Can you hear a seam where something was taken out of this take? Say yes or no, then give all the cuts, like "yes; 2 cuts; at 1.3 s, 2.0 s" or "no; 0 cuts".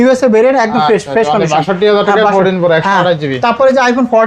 no; 0 cuts